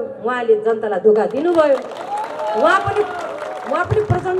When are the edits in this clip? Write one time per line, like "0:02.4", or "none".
none